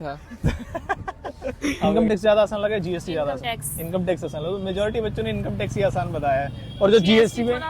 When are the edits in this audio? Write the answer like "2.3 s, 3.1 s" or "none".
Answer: 1.9 s